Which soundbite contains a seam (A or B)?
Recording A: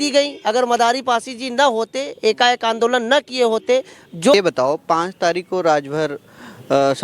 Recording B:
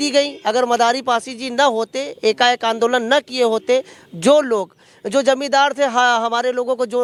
A